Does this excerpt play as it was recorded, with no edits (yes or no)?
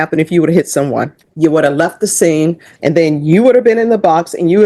no